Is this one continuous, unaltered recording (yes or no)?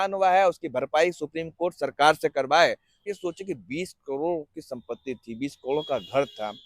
no